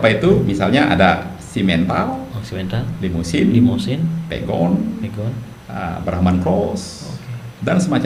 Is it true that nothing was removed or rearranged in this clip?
yes; 0 cuts

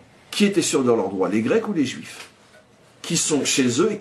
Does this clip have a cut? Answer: no; 0 cuts

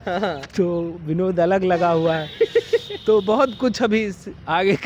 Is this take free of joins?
yes; 0 cuts

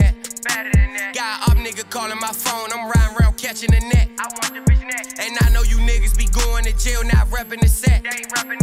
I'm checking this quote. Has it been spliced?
no; 0 cuts

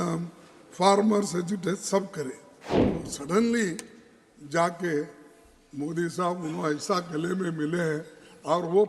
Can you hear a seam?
yes; 1 cut; at 2.8 s

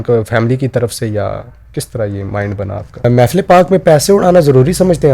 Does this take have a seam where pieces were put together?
yes; 1 cut; at 3.0 s

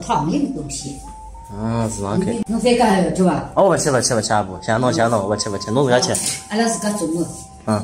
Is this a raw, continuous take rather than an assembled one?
no; 1 cut; at 2.4 s

